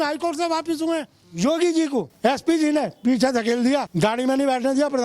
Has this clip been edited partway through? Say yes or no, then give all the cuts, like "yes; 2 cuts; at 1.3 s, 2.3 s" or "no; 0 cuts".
yes; 3 cuts; at 1.2 s, 2.1 s, 3.9 s